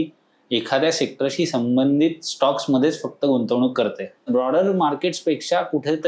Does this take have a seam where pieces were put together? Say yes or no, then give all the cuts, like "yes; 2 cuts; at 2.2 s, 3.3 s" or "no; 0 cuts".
yes; 1 cut; at 4.3 s